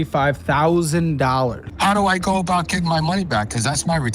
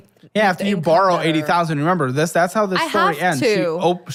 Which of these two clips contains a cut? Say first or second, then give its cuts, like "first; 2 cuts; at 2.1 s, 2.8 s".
first; 1 cut; at 1.7 s